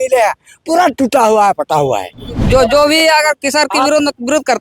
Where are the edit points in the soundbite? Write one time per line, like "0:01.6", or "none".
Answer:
0:02.4